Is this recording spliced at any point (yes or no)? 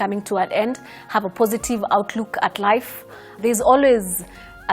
yes